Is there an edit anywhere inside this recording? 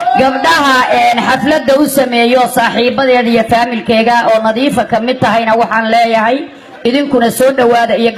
no; 0 cuts

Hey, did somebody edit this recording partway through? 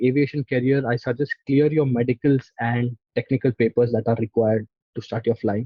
no; 0 cuts

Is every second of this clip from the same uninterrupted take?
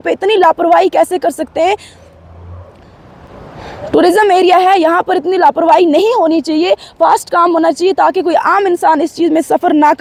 yes; 0 cuts

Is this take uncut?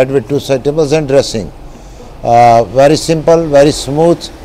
yes; 0 cuts

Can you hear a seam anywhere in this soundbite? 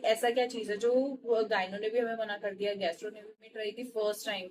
yes; 1 cut; at 3.4 s

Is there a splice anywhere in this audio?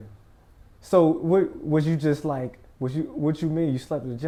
no; 0 cuts

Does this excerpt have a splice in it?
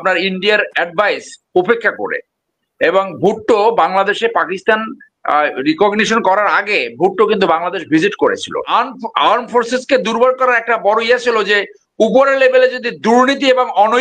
yes; 1 cut; at 8.7 s

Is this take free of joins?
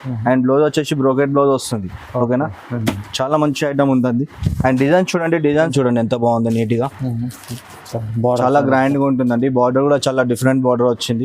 no; 1 cut; at 5.7 s

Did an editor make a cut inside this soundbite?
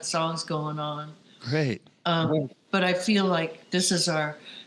no; 0 cuts

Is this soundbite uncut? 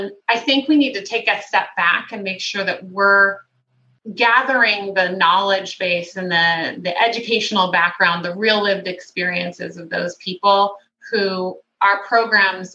yes; 0 cuts

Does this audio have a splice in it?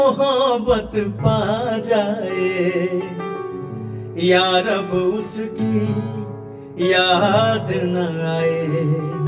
no; 0 cuts

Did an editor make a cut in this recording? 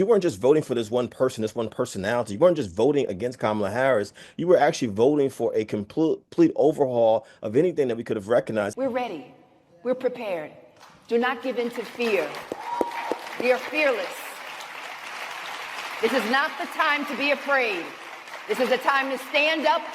yes; 1 cut; at 8.7 s

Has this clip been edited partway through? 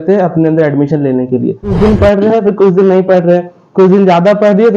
yes; 1 cut; at 1.8 s

